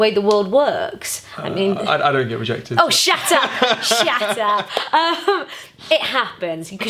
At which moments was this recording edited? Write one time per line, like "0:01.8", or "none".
none

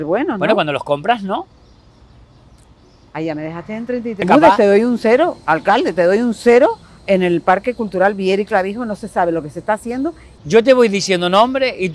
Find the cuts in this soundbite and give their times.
0:04.2
0:10.3

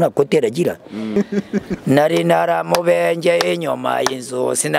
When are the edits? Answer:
0:01.1

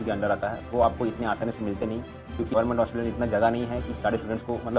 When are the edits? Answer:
0:02.5

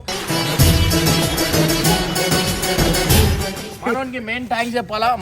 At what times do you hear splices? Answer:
0:03.5

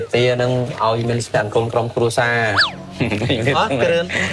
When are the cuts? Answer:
0:02.5

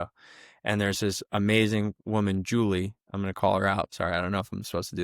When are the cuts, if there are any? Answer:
none

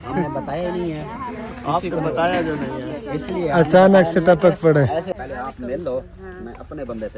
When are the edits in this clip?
0:05.1

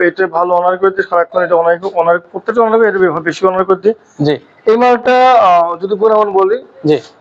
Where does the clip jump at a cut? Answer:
none

